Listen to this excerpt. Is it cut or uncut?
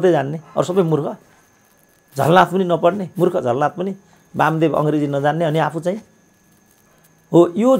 uncut